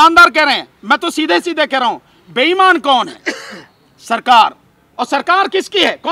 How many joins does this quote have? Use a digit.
0